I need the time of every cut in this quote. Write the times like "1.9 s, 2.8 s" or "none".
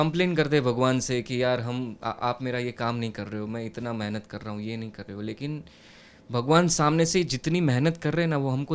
none